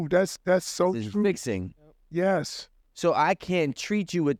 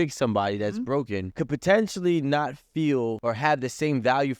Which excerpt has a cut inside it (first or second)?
second